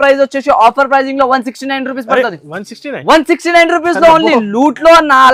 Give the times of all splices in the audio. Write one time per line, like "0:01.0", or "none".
none